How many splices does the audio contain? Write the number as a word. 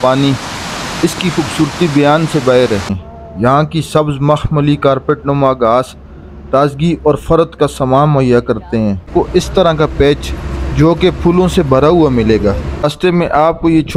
three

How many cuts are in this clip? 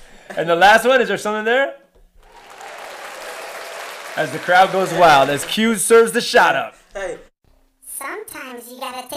zero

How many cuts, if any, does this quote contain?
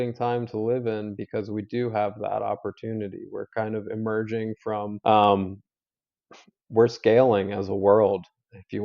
one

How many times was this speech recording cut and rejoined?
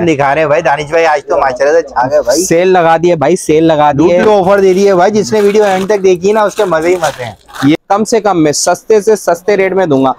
one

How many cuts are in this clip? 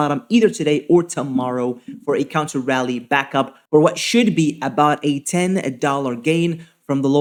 zero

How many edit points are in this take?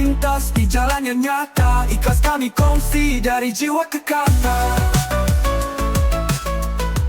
zero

